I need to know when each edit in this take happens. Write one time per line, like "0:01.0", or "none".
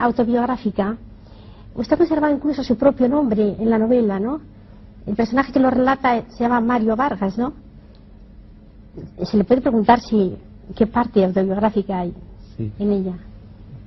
none

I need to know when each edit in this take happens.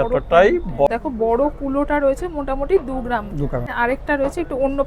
0:00.9
0:03.7

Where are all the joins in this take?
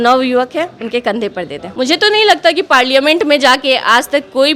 0:01.6

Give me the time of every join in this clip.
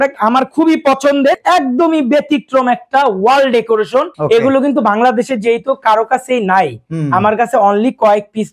0:01.4
0:04.1

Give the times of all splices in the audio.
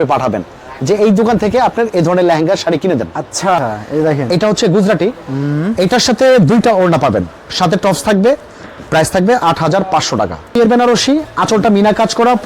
0:03.6
0:10.5

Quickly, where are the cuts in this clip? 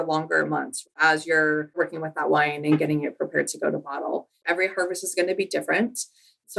0:04.4

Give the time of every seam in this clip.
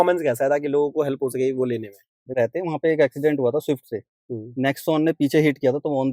0:02.3

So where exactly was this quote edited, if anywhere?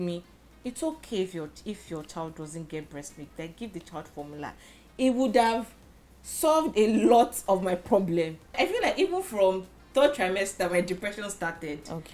0:08.5

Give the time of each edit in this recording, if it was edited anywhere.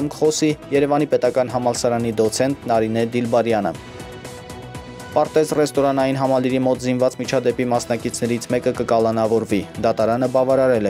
none

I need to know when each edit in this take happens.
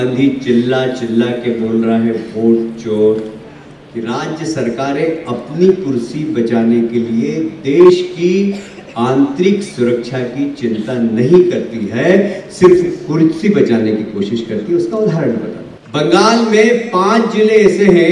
0:03.3

